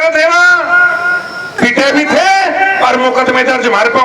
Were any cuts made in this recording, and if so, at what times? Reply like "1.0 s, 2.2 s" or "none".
1.6 s